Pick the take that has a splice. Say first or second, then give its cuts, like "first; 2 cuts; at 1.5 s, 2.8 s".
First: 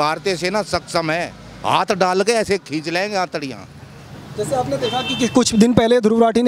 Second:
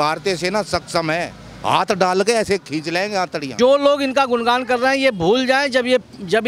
second; 1 cut; at 3.5 s